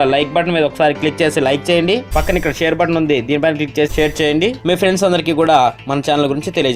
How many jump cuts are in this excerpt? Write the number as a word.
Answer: two